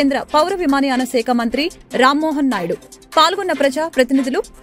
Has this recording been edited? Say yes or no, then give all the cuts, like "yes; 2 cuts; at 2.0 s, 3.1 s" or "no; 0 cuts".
no; 0 cuts